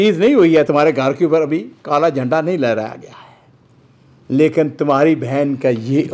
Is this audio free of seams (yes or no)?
yes